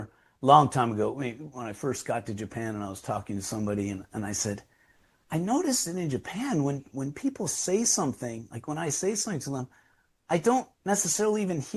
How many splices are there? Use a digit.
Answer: 0